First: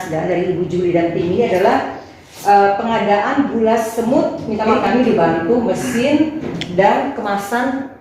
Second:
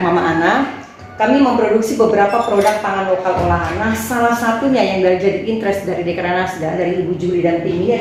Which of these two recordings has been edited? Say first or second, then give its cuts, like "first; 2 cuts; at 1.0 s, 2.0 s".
first; 1 cut; at 4.7 s